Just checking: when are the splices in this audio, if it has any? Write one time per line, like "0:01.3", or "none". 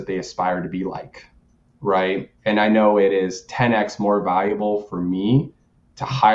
0:02.3